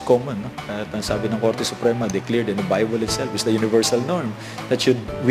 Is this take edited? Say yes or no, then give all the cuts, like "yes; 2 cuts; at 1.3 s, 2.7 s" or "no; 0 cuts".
no; 0 cuts